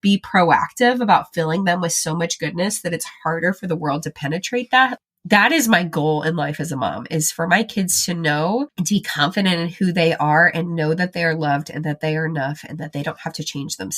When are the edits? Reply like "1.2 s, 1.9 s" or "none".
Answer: 8.7 s